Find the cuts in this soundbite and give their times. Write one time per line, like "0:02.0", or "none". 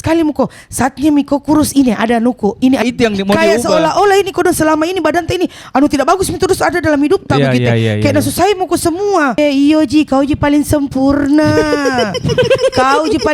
0:02.8
0:09.4